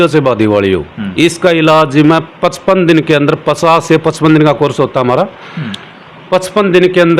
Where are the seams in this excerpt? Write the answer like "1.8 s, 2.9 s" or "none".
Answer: none